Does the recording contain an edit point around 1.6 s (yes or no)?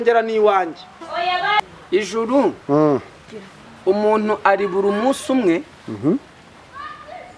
yes